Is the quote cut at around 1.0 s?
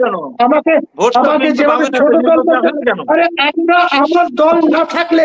no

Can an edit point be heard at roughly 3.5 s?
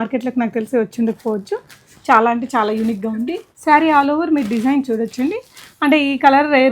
yes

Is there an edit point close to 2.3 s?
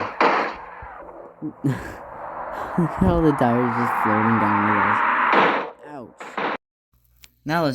no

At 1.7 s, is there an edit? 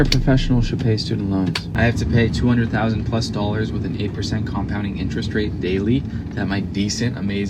yes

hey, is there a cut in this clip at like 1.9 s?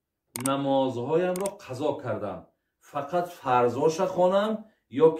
no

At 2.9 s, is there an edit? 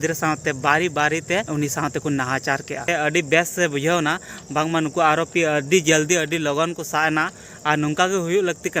yes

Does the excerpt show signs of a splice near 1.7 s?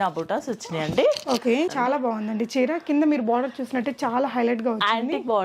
yes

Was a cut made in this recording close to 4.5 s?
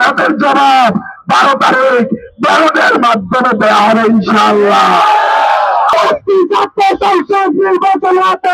no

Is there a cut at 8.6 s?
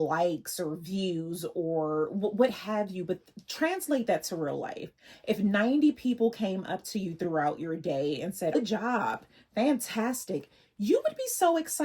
yes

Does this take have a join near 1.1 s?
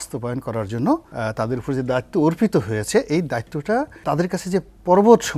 yes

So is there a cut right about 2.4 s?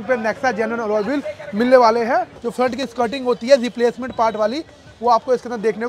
yes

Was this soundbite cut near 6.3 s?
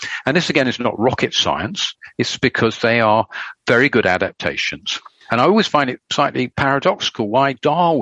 yes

